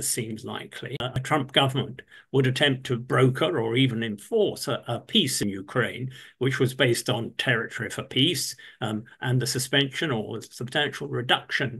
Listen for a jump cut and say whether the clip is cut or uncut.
cut